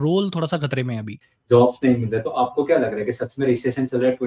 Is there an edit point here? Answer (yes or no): yes